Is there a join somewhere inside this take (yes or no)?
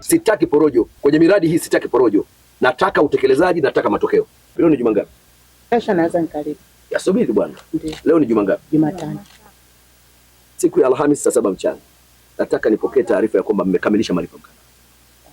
yes